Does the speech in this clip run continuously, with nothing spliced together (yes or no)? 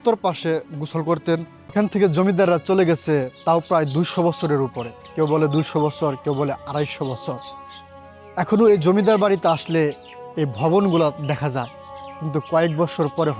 no